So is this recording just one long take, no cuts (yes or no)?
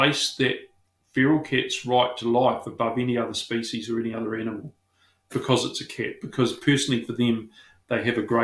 yes